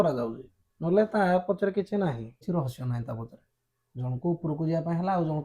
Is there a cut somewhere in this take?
yes; 1 cut; at 2.4 s

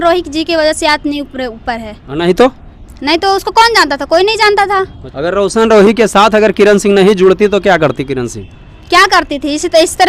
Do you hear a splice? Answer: yes; 1 cut; at 5.0 s

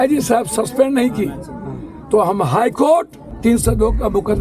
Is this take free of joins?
no; 1 cut; at 3.2 s

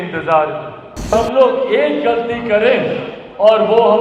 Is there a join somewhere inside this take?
yes; 1 cut; at 1.1 s

